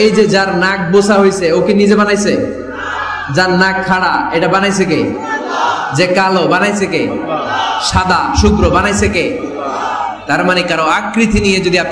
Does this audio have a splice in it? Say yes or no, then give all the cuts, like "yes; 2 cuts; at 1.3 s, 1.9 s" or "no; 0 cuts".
no; 0 cuts